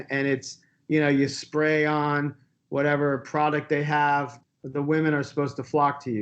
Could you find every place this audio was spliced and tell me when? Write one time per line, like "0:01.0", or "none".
0:04.4